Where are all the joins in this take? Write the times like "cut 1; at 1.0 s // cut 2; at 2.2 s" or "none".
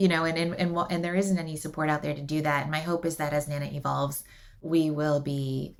none